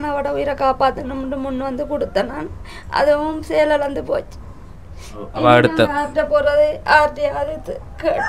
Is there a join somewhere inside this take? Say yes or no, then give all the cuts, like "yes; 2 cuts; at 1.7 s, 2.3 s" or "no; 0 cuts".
no; 0 cuts